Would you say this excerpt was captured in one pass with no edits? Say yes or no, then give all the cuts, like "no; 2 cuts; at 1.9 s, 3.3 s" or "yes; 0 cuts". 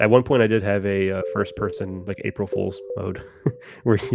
no; 1 cut; at 2.0 s